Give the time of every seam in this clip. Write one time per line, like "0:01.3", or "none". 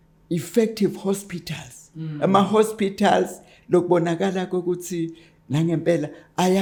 none

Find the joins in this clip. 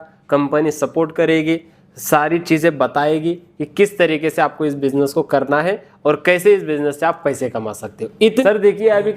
0:08.3

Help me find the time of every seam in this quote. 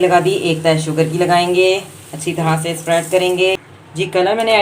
0:03.6

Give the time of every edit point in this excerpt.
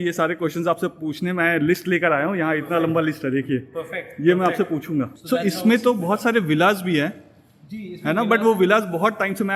0:05.2

